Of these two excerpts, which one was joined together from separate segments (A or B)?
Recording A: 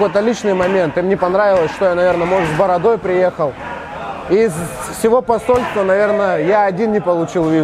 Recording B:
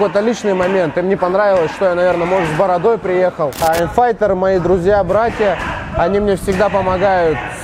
B